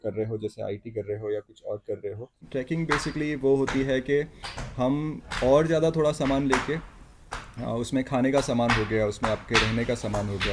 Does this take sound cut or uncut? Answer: cut